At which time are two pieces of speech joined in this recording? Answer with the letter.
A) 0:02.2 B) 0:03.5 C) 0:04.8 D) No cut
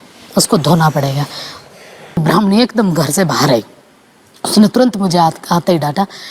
A